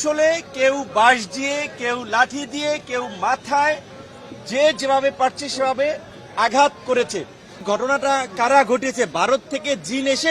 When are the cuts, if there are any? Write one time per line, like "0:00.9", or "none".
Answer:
0:07.6